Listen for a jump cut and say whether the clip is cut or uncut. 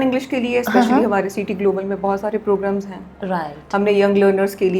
uncut